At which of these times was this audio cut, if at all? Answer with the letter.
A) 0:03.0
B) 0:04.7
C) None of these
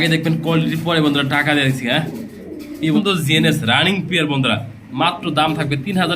A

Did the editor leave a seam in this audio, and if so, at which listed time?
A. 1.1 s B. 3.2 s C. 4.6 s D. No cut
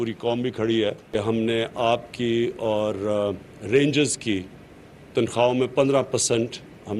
A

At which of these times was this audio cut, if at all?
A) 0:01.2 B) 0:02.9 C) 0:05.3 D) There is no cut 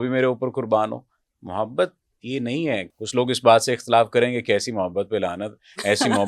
B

